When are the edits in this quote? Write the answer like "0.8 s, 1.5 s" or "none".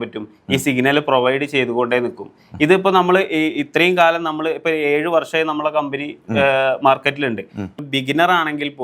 7.8 s